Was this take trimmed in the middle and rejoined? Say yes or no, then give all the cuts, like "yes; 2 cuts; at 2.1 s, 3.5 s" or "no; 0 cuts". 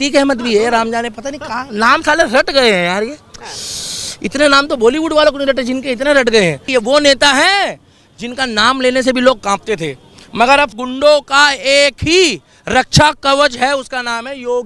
yes; 2 cuts; at 6.7 s, 10.7 s